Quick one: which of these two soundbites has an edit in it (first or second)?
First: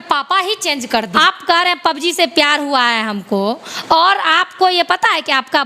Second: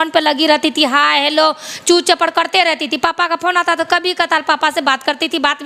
first